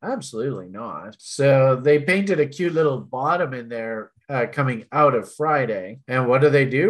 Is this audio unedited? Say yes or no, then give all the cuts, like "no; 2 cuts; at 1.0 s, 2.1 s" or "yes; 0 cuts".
yes; 0 cuts